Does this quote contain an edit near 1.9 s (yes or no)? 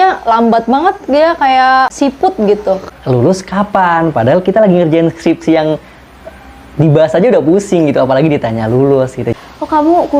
yes